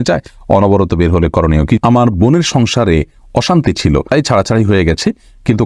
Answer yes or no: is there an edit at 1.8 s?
yes